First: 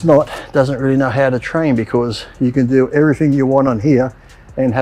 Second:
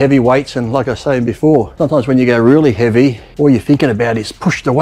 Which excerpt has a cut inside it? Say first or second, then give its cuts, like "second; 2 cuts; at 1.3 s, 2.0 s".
second; 2 cuts; at 1.7 s, 3.2 s